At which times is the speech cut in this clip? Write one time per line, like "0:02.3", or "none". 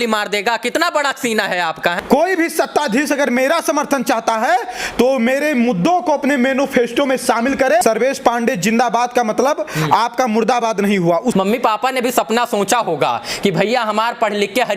0:02.0
0:07.8
0:11.3

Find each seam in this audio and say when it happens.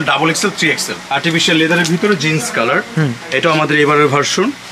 0:00.9

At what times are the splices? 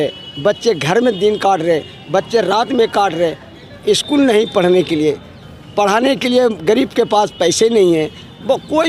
none

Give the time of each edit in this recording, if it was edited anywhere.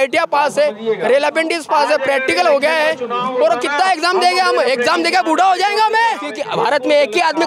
0:06.4

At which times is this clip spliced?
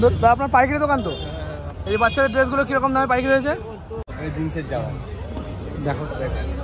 0:04.1

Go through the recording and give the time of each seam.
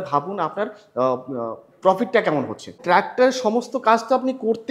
0:02.8

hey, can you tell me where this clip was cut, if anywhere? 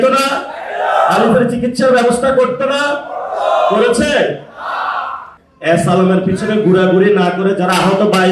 0:05.3

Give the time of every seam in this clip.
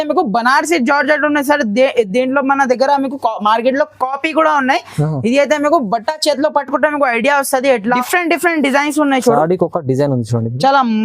0:08.0

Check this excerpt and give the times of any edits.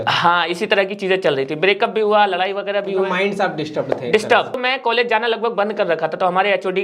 0:04.6

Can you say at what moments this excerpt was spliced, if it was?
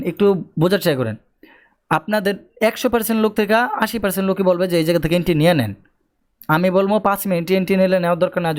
none

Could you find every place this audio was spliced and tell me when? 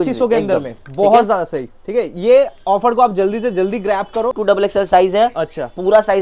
0:04.4

